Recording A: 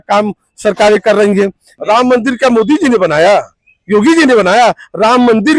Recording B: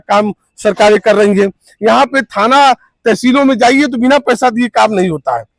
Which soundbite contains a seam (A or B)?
A